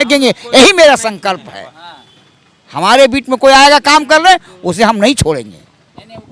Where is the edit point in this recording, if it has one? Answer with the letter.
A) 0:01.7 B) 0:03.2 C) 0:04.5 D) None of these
D